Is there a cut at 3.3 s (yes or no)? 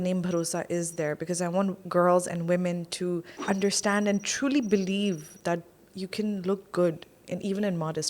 yes